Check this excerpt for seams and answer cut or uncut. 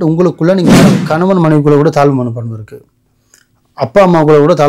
cut